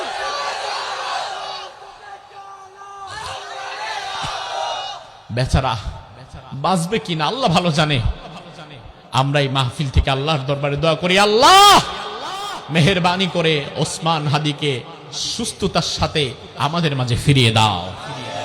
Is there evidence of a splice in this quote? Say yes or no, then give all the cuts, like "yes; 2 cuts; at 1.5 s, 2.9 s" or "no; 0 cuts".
yes; 1 cut; at 5.1 s